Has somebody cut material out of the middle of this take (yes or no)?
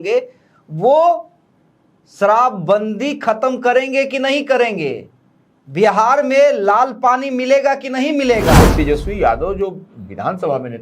yes